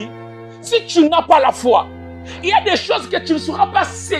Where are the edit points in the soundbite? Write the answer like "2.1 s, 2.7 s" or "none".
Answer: none